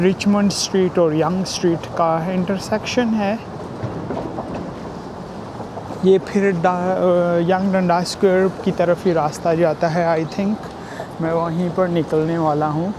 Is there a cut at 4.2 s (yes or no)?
no